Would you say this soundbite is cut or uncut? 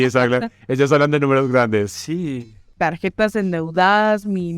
cut